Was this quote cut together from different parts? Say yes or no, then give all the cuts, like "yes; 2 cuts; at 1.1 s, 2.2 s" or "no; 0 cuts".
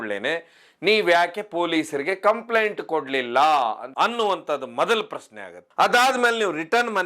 no; 0 cuts